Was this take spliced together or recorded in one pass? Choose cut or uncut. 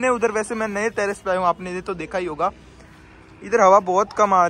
uncut